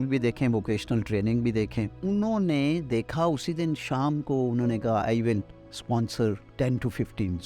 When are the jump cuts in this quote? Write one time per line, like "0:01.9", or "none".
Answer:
0:01.9
0:06.5